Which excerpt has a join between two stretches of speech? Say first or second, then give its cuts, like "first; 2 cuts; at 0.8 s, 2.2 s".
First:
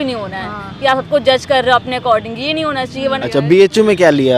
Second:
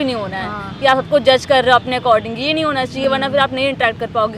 first; 1 cut; at 3.0 s